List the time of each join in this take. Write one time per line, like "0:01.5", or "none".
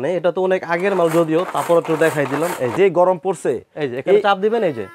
0:02.7